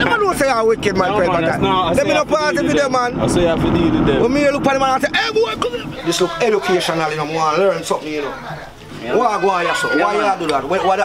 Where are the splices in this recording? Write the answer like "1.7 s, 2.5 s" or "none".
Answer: 5.8 s